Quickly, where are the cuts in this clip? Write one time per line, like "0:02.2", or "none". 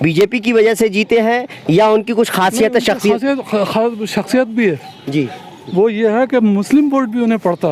none